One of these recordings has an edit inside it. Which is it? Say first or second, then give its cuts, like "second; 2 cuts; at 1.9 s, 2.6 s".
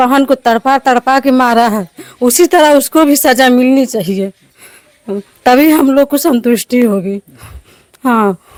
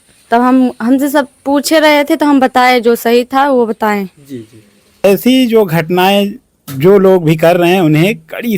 second; 1 cut; at 5.0 s